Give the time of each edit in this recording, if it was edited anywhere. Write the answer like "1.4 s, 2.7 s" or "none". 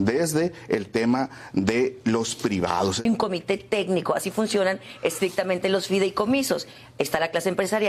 3.0 s

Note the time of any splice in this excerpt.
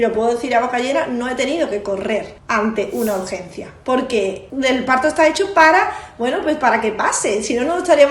2.4 s, 4.4 s

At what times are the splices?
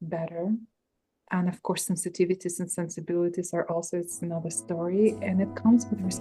none

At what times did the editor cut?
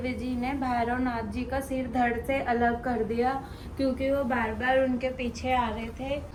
none

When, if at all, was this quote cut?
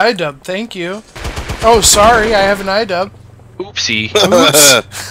1.2 s

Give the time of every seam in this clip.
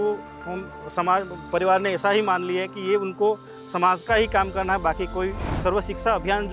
5.5 s

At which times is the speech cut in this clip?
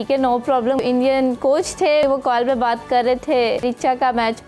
0.8 s, 2.0 s, 3.6 s

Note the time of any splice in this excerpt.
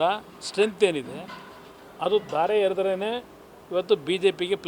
none

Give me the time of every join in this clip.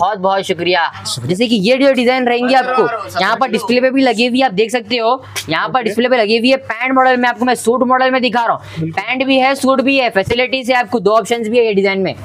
1.1 s

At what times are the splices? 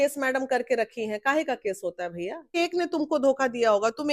2.6 s

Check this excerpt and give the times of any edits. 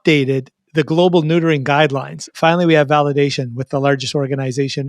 2.2 s

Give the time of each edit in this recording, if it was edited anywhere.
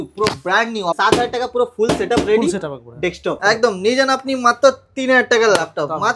1.0 s, 3.4 s

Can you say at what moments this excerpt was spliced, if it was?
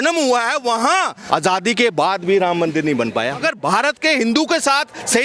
1.1 s, 3.4 s

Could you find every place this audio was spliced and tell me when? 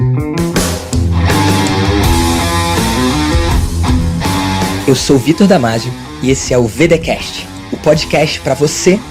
none

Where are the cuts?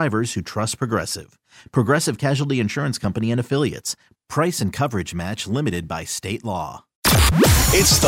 7.0 s

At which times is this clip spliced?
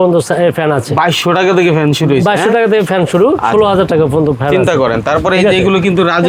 none

